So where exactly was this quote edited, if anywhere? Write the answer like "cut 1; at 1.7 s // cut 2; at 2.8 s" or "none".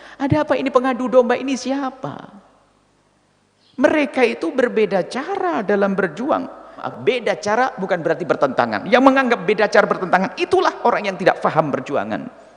cut 1; at 6.8 s